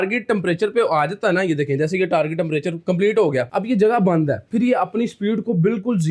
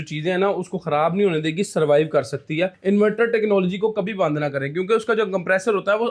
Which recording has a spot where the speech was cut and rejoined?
second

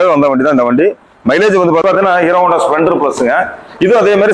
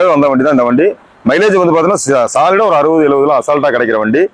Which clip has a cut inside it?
first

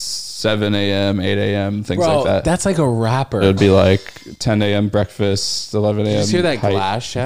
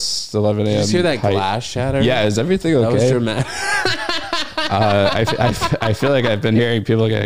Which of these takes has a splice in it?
first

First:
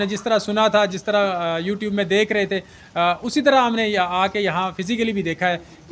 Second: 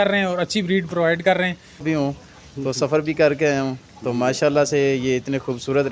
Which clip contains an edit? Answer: second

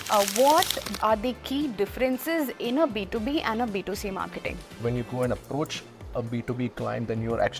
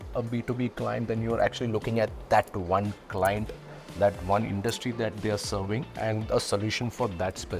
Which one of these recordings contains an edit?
first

